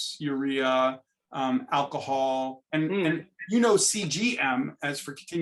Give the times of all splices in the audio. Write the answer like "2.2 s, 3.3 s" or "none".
2.6 s